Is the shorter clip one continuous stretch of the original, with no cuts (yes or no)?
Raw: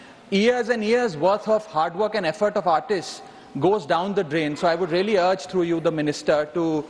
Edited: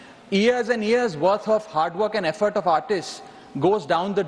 yes